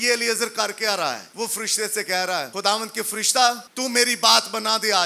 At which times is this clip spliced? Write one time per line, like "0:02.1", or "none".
0:01.3
0:02.5
0:03.7